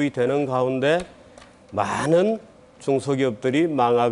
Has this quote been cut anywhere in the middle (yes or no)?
yes